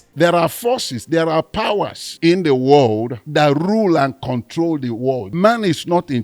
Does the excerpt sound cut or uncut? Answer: cut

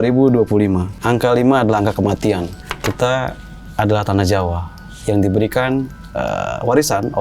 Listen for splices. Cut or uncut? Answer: cut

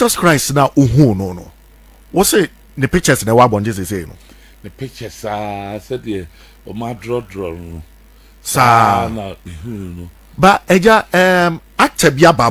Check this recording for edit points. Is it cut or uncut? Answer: uncut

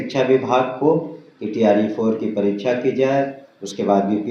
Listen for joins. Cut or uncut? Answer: uncut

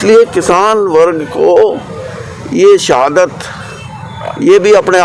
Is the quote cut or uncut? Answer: uncut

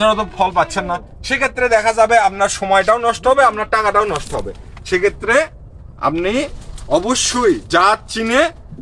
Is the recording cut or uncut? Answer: uncut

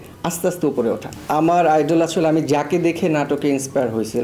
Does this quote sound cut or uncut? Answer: cut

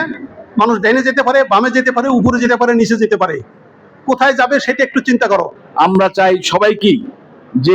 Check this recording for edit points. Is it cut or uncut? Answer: cut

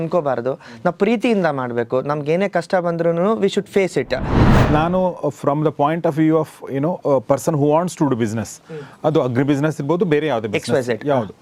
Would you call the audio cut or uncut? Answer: cut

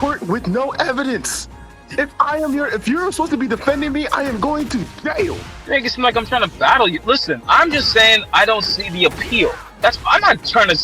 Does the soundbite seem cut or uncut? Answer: uncut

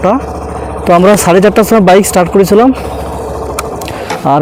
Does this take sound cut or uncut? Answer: uncut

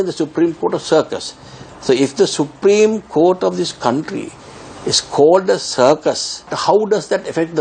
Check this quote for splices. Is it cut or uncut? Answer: cut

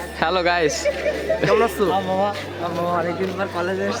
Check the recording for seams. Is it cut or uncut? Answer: uncut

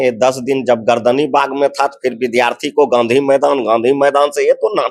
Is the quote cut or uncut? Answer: uncut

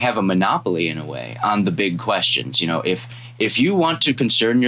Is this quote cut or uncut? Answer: uncut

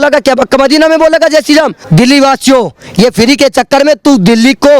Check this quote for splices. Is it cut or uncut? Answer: cut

